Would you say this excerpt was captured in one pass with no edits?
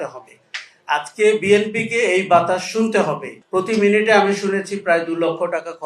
no; 1 cut; at 3.3 s

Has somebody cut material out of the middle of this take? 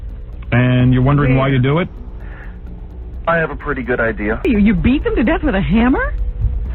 yes; 1 cut; at 4.4 s

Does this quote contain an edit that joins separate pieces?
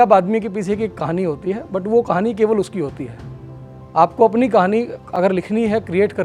no; 0 cuts

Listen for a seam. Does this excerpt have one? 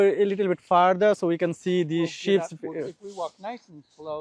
no; 0 cuts

